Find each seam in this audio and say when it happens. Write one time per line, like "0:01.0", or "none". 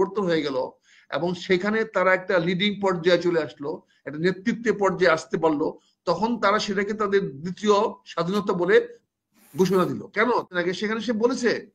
0:10.5